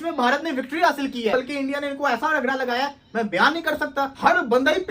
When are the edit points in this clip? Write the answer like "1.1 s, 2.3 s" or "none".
1.3 s, 4.1 s

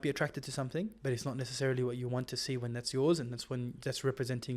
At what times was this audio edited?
1.0 s, 3.8 s

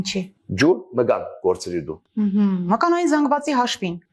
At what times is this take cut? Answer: none

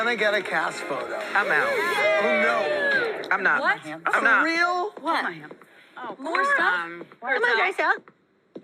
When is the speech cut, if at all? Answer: none

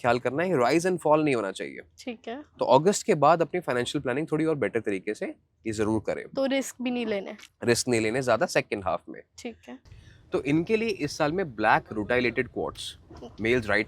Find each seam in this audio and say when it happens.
9.7 s

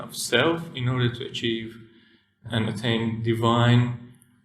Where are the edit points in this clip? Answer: 2.4 s

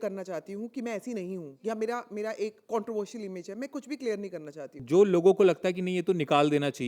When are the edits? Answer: 1.5 s, 2.6 s, 4.7 s

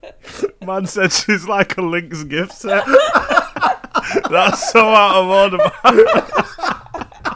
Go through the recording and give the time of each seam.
none

